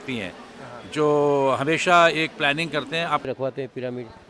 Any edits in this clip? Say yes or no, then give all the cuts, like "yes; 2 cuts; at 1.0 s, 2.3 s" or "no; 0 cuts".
yes; 1 cut; at 3.3 s